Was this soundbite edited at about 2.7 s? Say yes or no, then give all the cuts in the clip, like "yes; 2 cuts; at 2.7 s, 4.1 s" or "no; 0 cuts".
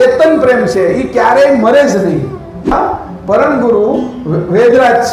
yes; 1 cut; at 2.7 s